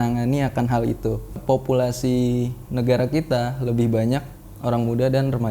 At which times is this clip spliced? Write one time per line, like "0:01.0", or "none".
0:01.4